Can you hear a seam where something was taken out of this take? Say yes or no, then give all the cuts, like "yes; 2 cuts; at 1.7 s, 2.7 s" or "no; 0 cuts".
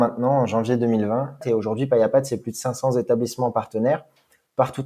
yes; 1 cut; at 1.4 s